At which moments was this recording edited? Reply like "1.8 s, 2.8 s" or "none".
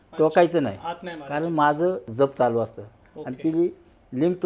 2.1 s